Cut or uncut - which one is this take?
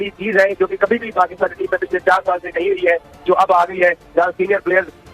uncut